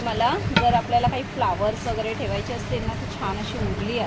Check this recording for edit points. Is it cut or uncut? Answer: uncut